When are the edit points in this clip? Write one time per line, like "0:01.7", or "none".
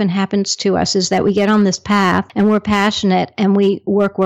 0:02.3